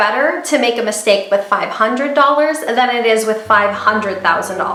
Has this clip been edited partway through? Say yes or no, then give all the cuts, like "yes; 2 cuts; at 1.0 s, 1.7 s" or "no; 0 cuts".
no; 0 cuts